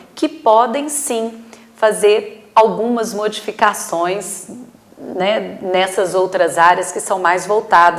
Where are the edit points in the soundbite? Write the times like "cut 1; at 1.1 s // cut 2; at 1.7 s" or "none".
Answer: none